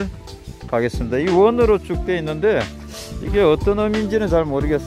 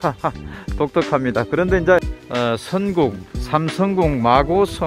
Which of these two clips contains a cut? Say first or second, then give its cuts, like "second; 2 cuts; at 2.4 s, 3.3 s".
second; 1 cut; at 2.2 s